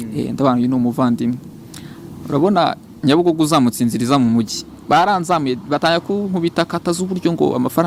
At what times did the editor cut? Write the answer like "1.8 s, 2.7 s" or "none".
none